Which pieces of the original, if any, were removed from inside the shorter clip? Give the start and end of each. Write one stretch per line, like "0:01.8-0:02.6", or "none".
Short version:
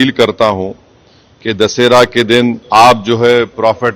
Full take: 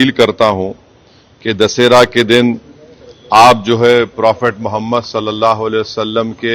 0:02.6-0:03.2